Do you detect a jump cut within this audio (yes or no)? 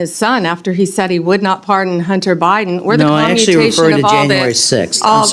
no